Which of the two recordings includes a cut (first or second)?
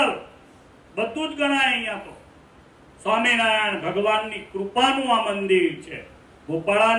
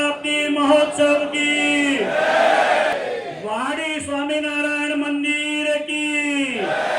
second